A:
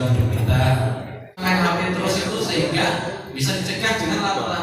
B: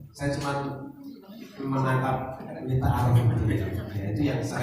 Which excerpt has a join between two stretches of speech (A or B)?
A